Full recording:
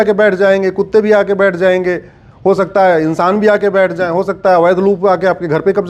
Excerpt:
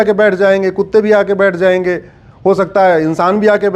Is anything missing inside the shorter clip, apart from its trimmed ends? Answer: no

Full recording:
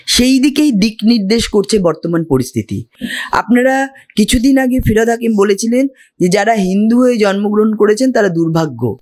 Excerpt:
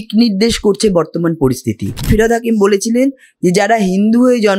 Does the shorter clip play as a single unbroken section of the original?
no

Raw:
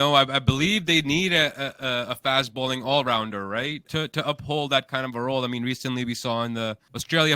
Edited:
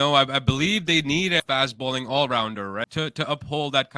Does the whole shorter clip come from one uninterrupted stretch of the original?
no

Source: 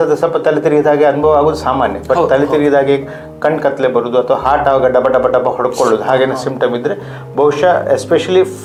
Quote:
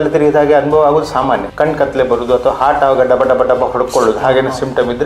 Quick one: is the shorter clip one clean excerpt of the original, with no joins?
no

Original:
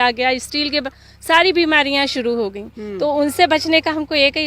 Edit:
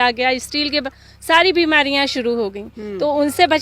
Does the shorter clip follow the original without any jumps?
yes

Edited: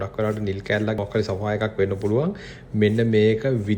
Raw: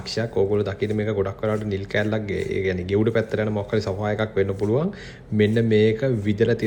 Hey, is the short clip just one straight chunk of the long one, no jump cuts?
no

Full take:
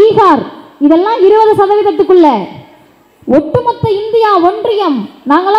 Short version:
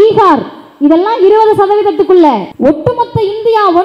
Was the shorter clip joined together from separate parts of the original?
yes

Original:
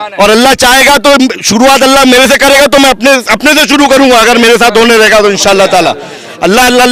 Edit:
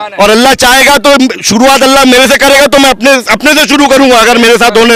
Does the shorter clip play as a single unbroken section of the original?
yes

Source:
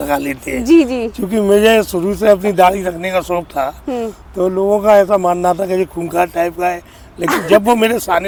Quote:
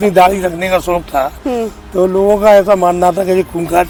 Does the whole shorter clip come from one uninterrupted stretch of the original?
yes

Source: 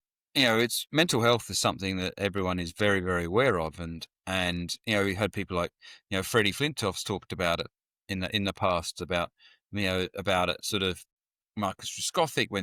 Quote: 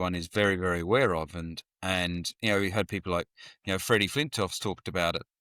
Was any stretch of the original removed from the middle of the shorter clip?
no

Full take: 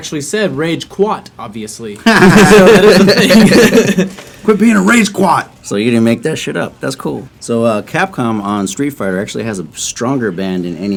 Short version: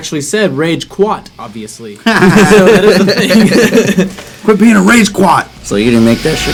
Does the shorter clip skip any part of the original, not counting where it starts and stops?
no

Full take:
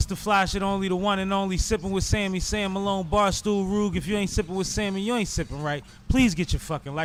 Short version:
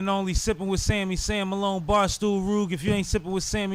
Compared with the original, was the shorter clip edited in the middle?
no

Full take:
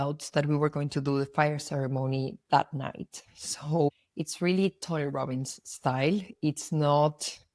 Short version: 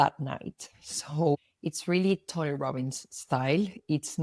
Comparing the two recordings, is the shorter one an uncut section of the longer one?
yes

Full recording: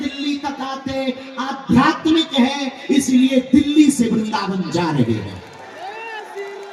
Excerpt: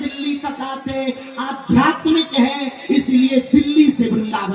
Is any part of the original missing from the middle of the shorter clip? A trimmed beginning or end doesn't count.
no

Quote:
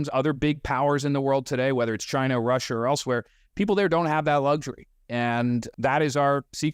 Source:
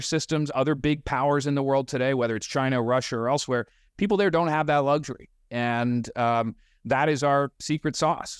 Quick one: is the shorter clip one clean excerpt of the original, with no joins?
no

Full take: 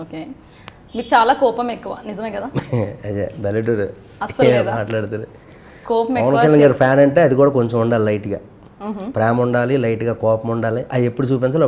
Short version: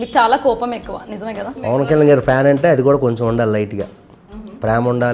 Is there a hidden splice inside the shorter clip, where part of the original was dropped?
yes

